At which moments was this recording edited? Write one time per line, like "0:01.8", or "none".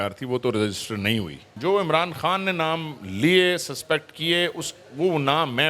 0:01.5